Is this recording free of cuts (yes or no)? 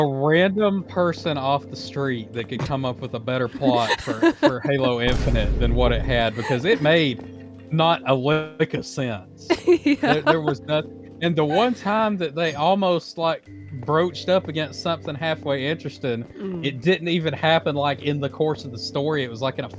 yes